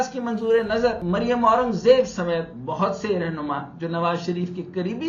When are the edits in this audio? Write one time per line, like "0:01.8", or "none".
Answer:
none